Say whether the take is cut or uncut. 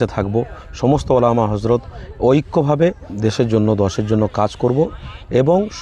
cut